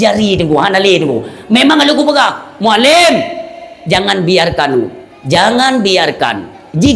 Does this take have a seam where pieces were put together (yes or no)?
no